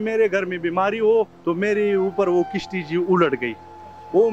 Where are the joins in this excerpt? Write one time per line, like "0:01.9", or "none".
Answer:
0:01.4